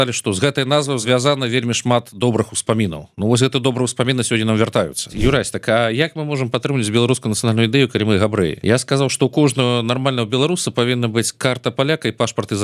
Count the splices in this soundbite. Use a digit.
3